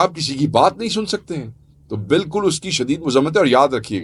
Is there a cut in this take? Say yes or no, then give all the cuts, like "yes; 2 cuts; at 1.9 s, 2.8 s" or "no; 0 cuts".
no; 0 cuts